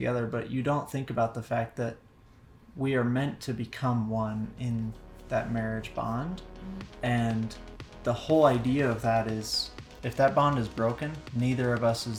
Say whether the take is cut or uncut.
uncut